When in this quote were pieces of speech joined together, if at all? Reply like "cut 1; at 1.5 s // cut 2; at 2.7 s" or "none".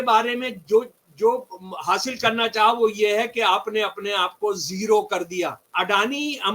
cut 1; at 5.6 s